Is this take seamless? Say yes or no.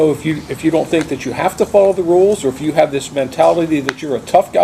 yes